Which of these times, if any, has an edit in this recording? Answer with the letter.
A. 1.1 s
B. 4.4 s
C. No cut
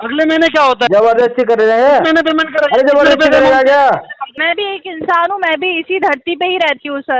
B